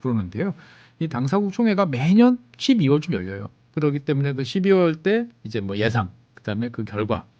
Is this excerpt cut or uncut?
cut